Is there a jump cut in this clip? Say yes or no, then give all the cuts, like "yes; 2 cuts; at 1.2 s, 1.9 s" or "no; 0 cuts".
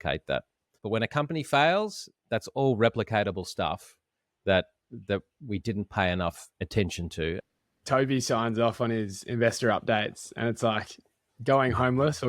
yes; 1 cut; at 7.6 s